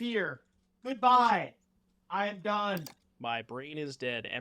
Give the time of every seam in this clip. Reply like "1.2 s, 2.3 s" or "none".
3.0 s

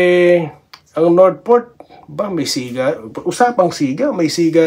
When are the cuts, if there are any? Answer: none

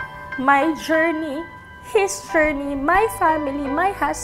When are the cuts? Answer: none

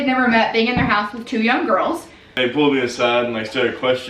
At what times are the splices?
2.4 s

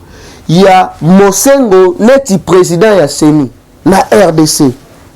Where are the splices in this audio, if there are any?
3.6 s

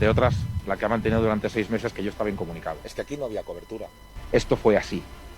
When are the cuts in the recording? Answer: 4.1 s

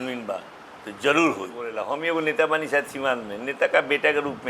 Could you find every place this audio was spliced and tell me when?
1.7 s

